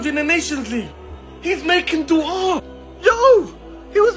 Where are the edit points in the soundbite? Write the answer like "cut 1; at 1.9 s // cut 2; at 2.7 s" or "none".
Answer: none